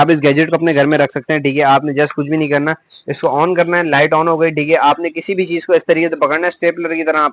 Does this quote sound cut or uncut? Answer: uncut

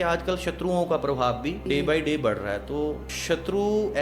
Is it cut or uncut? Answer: cut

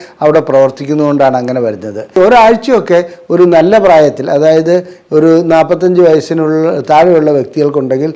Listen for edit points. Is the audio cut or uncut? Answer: cut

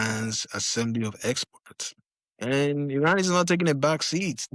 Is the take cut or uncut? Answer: uncut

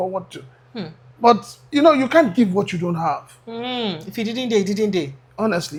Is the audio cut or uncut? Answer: uncut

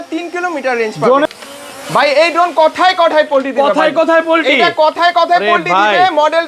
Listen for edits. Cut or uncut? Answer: cut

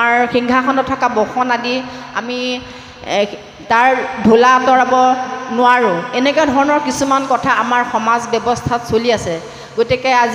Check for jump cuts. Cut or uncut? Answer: uncut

